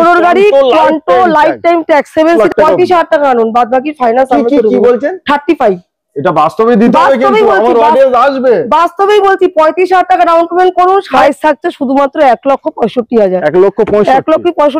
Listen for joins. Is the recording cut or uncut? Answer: cut